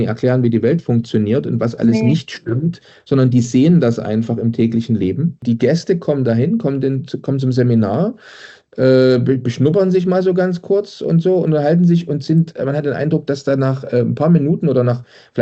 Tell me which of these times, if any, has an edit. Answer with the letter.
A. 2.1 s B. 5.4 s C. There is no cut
B